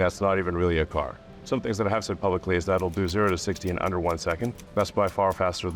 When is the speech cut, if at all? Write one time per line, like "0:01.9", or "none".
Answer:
0:01.3
0:04.6